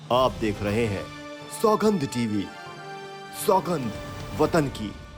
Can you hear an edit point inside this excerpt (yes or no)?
no